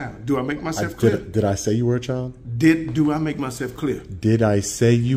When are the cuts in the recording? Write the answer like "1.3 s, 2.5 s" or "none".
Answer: none